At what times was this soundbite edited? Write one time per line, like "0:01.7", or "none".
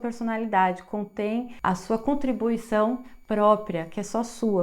0:01.5